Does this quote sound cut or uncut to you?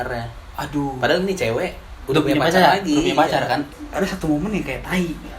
cut